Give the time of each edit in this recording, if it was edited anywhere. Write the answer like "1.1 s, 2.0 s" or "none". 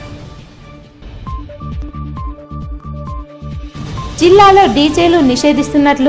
none